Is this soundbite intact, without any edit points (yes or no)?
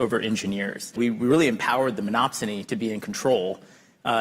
no